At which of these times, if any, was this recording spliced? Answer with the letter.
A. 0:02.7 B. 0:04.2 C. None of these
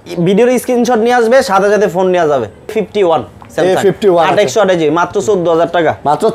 A